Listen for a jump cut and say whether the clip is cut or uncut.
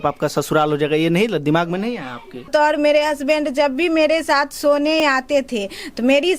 cut